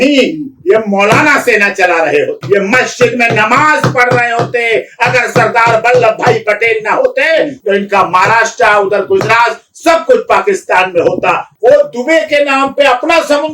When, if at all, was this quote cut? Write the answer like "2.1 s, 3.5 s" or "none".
2.4 s, 11.5 s